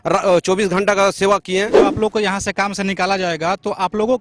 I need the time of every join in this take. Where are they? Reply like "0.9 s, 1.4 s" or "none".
1.7 s